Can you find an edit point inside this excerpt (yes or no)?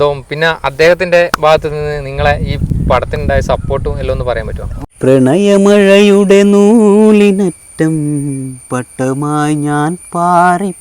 yes